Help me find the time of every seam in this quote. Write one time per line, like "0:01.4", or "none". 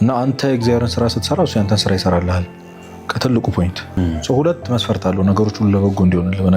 0:04.0